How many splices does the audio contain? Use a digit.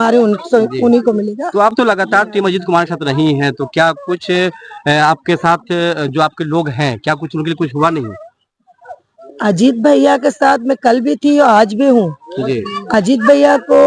0